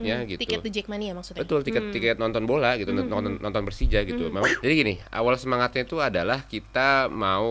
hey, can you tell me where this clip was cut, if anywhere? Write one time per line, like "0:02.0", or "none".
0:04.5